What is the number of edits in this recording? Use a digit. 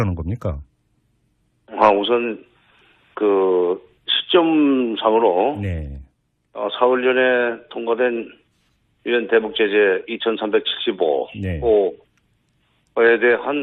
0